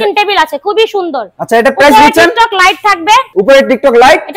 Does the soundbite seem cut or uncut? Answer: uncut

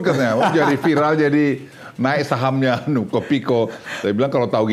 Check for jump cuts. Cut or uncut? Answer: uncut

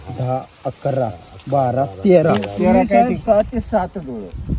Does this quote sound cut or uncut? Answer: cut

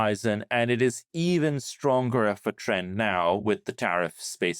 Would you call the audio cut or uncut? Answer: uncut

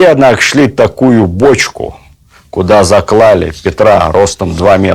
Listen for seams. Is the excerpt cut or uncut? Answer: uncut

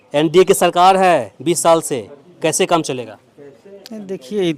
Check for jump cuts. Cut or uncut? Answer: uncut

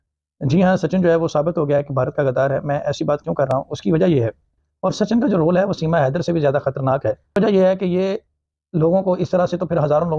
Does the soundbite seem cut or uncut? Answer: cut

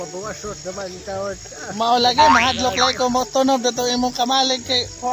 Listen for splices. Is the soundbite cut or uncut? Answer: uncut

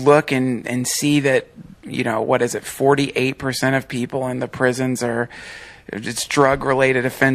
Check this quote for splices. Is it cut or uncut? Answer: uncut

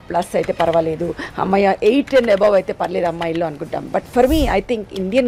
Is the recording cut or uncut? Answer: uncut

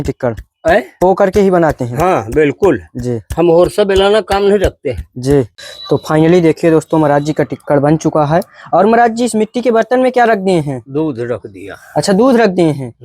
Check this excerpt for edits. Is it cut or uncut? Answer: cut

